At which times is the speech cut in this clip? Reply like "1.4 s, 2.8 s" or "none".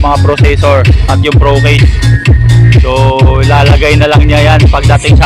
none